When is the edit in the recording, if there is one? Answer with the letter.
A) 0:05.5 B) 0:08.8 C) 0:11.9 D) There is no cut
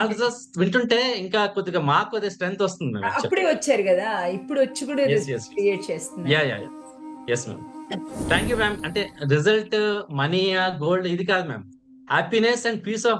B